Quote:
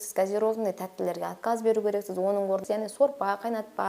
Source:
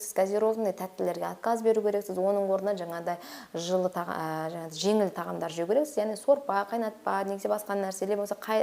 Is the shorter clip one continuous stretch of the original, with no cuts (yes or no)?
no